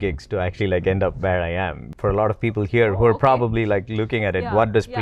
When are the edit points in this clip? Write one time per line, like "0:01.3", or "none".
0:01.8